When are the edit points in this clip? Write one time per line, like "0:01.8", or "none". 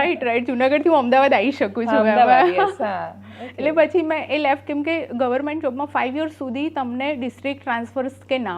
none